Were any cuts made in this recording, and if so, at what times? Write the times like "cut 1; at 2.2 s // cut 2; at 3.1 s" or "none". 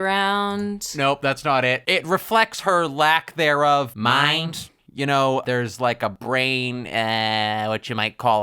cut 1; at 1.8 s // cut 2; at 3.9 s

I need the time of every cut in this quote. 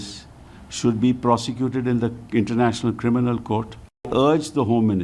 cut 1; at 4.1 s

